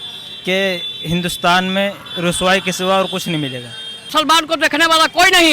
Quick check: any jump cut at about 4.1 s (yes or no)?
yes